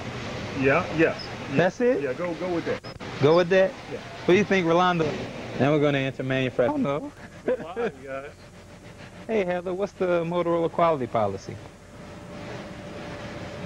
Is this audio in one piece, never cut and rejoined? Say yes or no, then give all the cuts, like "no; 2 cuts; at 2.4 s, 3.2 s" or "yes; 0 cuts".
no; 1 cut; at 6.7 s